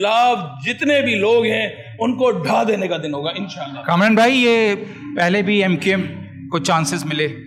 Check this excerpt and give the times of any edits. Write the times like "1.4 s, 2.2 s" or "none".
none